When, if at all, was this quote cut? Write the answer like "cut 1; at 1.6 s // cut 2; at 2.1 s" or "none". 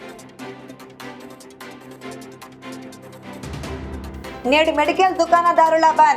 cut 1; at 1.8 s